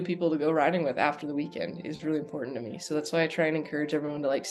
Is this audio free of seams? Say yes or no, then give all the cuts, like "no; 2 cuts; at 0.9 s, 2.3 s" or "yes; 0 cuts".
yes; 0 cuts